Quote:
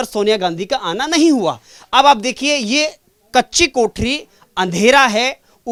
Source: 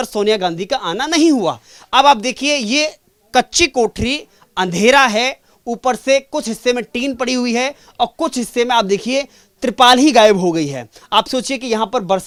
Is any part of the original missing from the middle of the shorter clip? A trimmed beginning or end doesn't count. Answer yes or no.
no